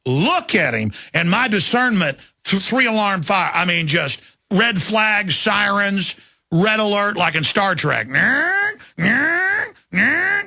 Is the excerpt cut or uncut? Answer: cut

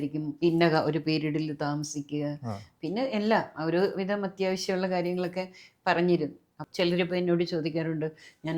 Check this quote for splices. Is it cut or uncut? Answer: cut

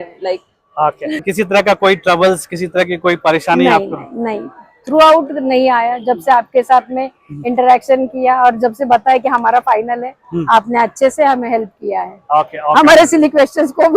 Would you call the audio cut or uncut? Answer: cut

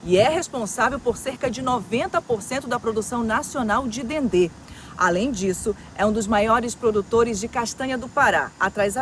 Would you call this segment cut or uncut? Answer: uncut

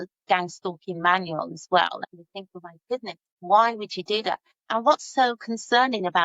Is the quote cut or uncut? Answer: cut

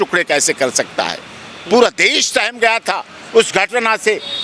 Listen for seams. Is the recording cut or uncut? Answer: uncut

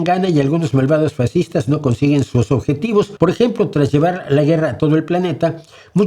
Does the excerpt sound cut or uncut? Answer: cut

